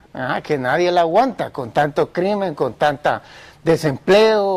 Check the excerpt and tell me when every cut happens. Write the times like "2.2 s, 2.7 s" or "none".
1.3 s